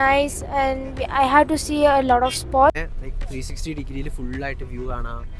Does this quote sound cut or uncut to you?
cut